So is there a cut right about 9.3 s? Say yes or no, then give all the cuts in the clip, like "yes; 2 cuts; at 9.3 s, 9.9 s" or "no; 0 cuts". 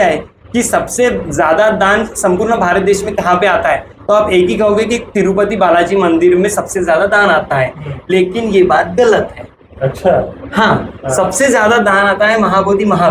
no; 0 cuts